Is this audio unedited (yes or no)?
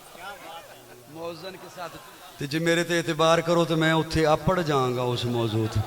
no